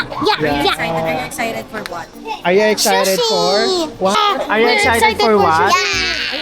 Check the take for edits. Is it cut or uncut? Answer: cut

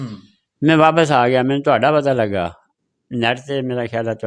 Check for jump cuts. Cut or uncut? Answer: uncut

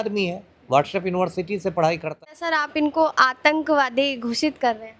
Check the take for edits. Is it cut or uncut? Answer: cut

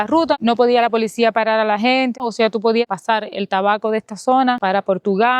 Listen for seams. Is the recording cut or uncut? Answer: uncut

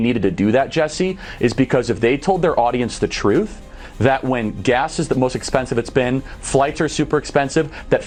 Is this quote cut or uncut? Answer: uncut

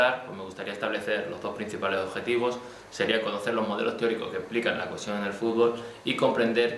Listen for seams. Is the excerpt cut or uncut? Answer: cut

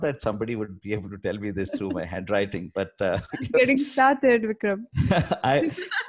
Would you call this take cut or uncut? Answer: cut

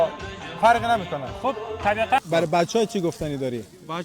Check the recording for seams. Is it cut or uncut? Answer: cut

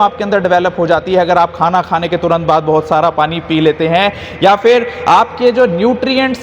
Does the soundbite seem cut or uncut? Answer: uncut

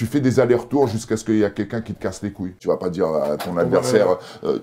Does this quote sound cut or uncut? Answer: cut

